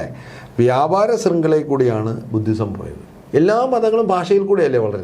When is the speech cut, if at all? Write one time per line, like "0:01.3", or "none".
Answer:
0:03.2